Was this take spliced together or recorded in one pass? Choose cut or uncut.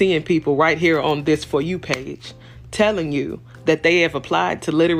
uncut